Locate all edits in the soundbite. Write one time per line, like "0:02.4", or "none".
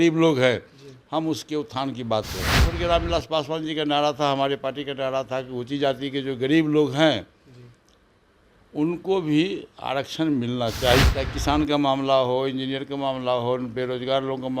0:02.6
0:11.0